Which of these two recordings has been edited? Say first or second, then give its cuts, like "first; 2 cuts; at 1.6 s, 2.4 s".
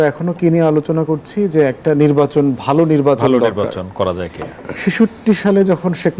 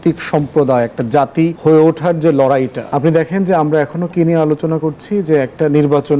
second; 2 cuts; at 1.6 s, 2.8 s